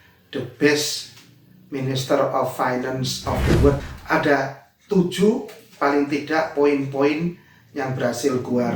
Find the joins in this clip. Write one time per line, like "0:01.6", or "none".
0:03.8